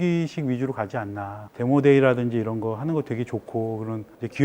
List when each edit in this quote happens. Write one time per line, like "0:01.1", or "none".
0:01.4

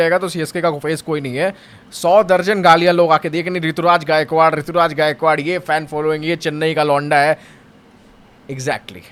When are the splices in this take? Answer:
none

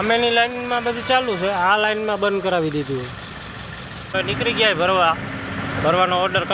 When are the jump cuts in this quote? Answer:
0:04.1

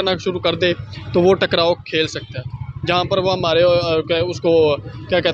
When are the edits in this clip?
none

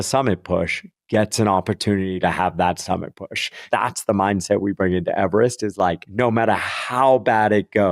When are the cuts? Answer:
0:03.6
0:06.0

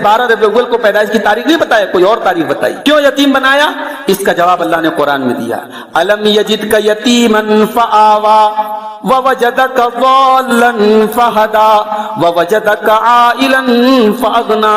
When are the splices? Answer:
0:02.8

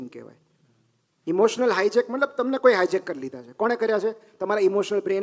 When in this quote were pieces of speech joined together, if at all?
none

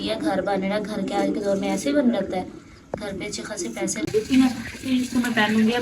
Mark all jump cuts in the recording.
0:04.1

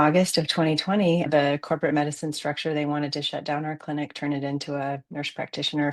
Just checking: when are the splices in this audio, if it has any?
0:01.3

